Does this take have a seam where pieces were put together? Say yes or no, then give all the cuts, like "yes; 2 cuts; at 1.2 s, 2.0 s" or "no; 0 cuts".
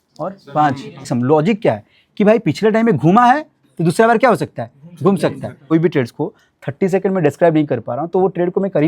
yes; 2 cuts; at 1.1 s, 5.6 s